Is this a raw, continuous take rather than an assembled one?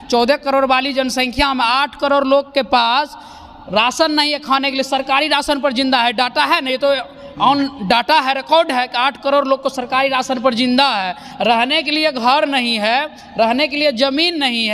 yes; 0 cuts

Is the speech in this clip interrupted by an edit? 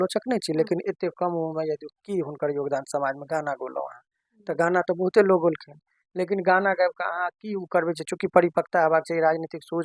no; 0 cuts

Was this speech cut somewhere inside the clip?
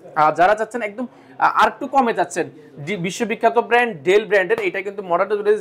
no; 0 cuts

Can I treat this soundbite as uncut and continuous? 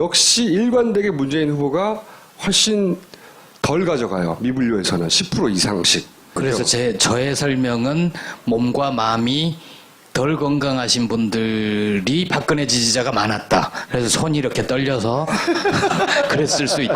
no; 1 cut; at 14.2 s

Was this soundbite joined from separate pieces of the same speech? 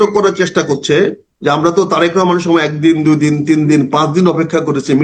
no; 0 cuts

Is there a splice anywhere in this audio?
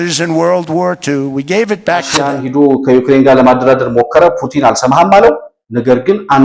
yes; 1 cut; at 2.4 s

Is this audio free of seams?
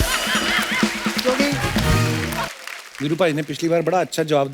no; 1 cut; at 2.5 s

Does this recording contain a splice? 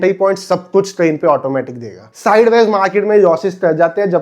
yes; 1 cut; at 2.1 s

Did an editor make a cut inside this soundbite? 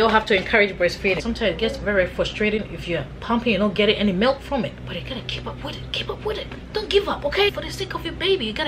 yes; 3 cuts; at 1.2 s, 4.8 s, 7.5 s

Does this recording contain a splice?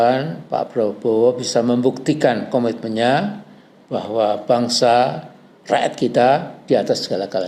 no; 0 cuts

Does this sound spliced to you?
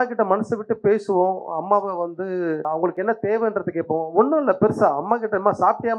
yes; 1 cut; at 2.6 s

